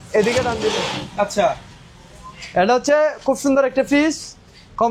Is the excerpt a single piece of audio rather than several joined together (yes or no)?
yes